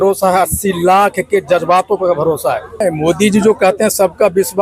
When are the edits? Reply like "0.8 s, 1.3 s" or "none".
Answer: 2.7 s